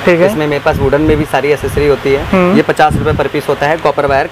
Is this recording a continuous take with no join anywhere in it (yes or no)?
yes